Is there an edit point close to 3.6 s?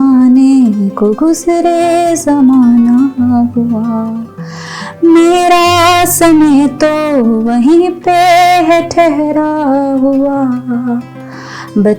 no; 0 cuts

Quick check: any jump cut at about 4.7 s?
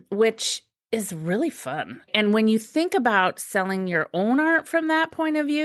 no; 1 cut; at 2.1 s

